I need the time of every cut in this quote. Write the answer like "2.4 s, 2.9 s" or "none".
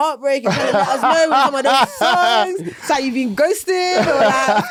none